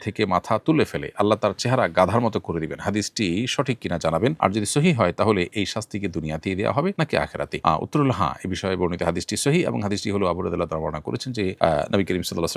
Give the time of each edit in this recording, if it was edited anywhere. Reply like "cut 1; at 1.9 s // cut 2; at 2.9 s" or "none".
none